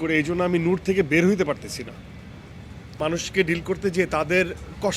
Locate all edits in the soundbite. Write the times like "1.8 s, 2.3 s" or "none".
3.0 s